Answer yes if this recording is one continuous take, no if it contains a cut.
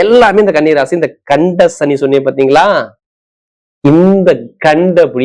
yes